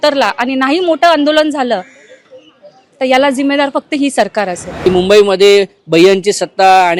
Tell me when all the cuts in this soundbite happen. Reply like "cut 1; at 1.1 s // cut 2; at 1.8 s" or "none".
cut 1; at 4.7 s